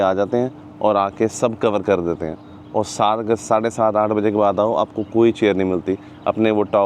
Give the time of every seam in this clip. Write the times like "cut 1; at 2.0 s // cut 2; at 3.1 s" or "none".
none